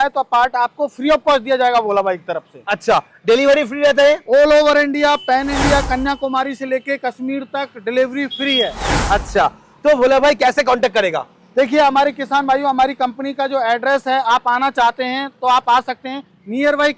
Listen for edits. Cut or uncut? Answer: uncut